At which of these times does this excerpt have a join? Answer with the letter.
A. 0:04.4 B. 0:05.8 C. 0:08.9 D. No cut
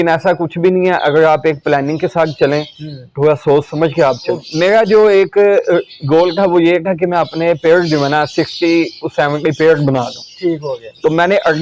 A